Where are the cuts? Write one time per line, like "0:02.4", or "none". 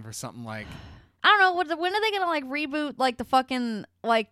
0:01.1